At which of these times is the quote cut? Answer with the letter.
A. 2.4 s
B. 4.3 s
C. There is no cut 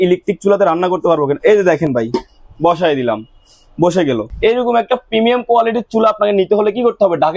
B